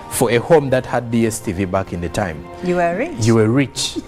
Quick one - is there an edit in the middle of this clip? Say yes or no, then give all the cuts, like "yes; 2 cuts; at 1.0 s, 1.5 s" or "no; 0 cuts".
no; 0 cuts